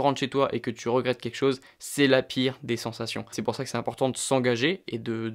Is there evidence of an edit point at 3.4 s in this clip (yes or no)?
yes